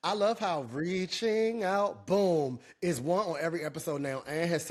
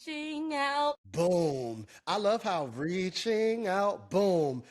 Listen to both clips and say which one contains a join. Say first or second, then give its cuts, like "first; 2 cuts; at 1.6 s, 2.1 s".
second; 1 cut; at 1.0 s